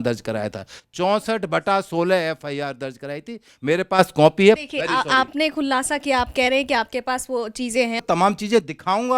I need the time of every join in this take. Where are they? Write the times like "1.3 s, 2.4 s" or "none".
4.6 s, 8.0 s